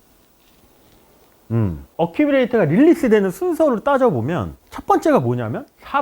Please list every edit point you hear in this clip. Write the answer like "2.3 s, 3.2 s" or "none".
1.9 s